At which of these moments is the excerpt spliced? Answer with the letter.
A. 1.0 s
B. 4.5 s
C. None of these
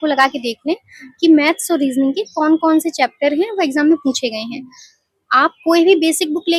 C